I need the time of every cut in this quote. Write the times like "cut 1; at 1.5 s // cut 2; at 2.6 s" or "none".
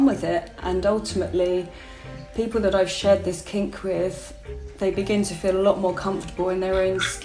none